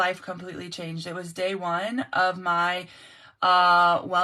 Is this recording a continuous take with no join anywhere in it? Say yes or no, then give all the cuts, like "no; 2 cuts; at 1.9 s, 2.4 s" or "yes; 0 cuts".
yes; 0 cuts